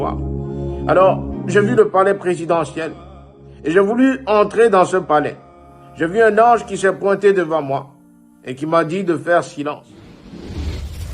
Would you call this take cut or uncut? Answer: cut